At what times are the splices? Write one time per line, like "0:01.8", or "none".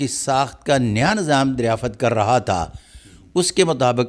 none